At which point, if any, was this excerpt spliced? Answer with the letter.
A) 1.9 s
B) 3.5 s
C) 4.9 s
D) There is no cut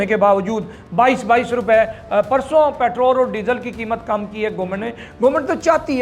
D